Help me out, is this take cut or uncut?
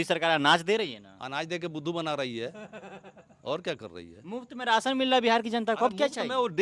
uncut